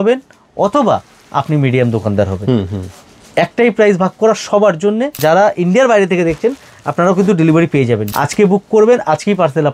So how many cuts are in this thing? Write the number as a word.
two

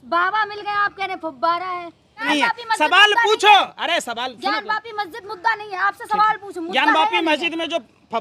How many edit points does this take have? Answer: one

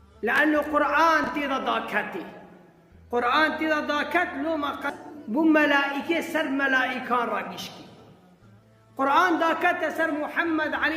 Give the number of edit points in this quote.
one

